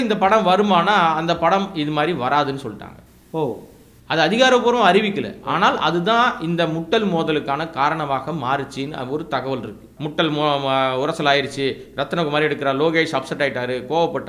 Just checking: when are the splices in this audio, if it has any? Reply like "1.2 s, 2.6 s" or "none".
9.9 s

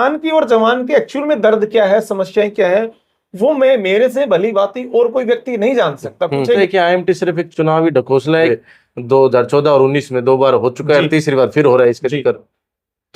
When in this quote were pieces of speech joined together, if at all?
6.6 s, 8.5 s

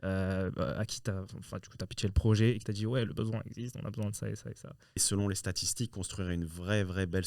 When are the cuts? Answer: 5.0 s

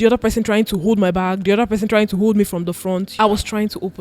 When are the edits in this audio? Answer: 3.1 s

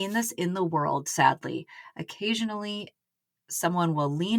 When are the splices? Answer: none

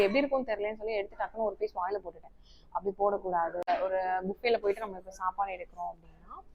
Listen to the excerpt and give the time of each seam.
3.7 s

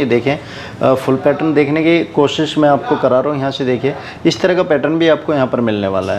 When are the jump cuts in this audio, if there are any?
none

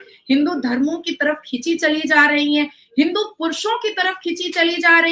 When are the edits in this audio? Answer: none

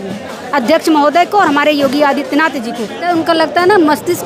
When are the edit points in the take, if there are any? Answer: 3.1 s

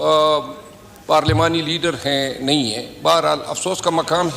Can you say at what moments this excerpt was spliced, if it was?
none

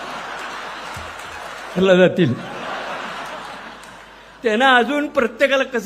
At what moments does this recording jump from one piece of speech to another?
1.8 s

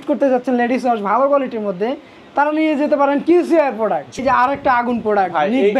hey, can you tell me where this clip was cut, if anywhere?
4.2 s

